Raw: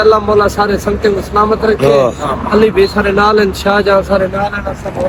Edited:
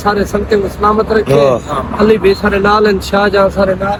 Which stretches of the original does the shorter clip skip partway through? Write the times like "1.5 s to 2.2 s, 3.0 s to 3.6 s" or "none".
none